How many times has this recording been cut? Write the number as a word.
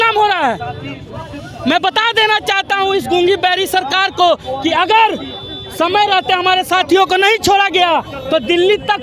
zero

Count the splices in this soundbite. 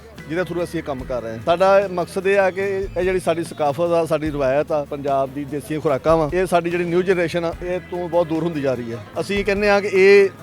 zero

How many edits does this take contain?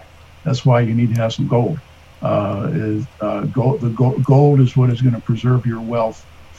zero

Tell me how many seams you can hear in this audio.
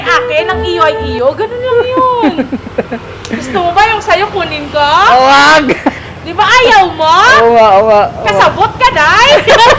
zero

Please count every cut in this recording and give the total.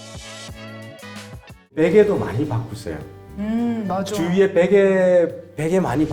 one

